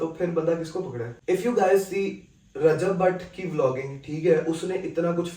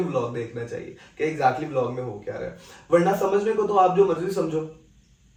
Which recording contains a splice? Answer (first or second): first